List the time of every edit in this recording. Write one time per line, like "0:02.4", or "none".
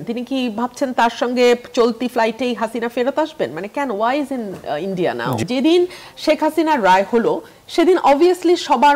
0:05.4